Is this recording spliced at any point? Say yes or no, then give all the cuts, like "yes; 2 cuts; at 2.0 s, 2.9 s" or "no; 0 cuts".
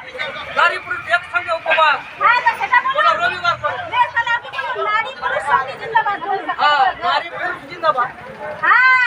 no; 0 cuts